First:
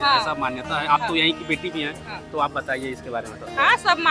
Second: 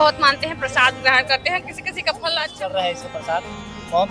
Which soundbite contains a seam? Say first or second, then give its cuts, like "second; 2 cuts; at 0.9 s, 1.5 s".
second; 1 cut; at 2.5 s